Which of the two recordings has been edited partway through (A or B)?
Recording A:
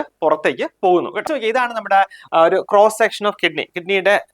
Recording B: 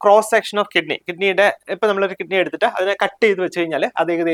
A